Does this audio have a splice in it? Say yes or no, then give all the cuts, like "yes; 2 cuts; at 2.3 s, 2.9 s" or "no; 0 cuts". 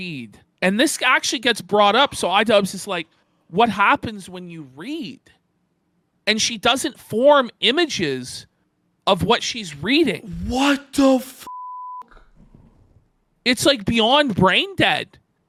no; 0 cuts